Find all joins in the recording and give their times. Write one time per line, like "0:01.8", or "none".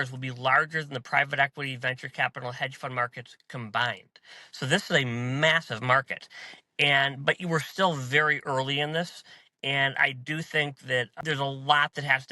0:11.1